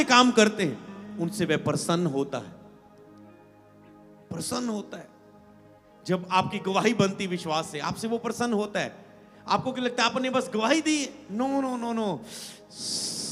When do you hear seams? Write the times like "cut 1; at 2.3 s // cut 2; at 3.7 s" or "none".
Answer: none

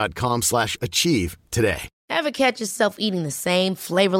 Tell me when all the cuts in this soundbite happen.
cut 1; at 1.9 s

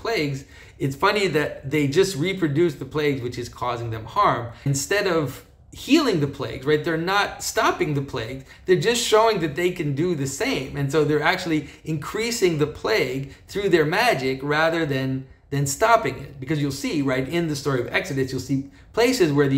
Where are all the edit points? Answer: cut 1; at 4.7 s

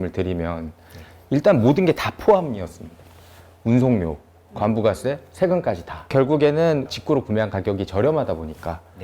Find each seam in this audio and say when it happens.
cut 1; at 6.1 s

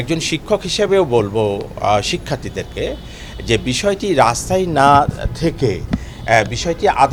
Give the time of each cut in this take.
none

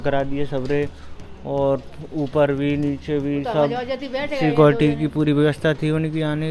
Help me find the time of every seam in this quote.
none

